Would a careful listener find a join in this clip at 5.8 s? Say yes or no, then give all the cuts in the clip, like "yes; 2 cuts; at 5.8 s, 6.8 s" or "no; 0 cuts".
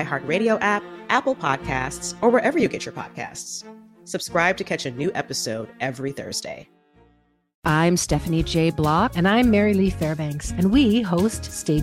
no; 1 cut; at 7.5 s